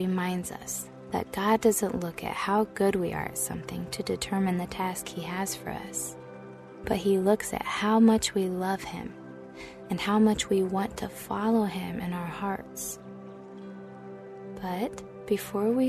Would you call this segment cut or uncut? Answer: uncut